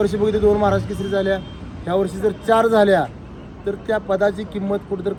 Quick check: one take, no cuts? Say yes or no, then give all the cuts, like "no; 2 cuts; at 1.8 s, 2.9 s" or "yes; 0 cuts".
yes; 0 cuts